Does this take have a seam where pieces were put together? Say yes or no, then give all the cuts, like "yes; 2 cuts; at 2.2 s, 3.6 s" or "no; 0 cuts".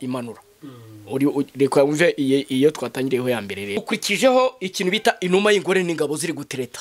yes; 1 cut; at 3.8 s